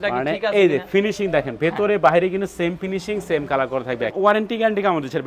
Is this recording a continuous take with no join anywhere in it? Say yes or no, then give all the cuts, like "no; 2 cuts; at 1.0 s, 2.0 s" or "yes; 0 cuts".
no; 1 cut; at 4.1 s